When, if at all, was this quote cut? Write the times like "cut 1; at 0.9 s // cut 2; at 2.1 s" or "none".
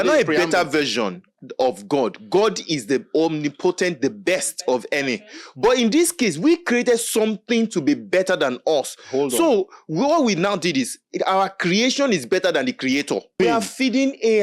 cut 1; at 13.4 s